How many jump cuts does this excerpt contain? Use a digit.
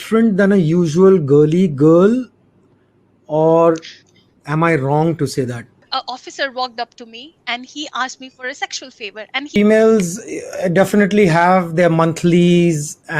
2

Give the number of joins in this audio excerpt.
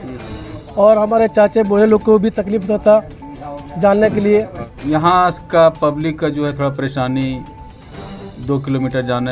1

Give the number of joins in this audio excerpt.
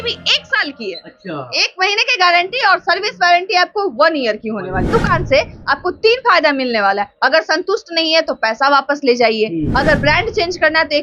1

